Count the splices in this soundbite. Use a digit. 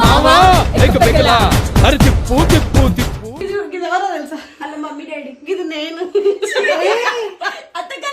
1